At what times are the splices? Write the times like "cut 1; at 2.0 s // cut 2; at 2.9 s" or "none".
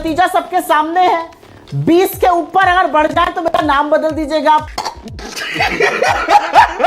none